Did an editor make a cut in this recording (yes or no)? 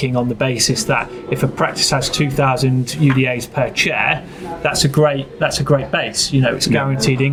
no